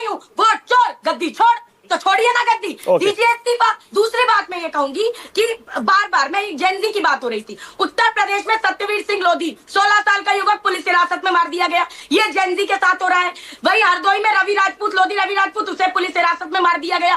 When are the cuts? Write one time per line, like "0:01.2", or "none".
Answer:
0:03.8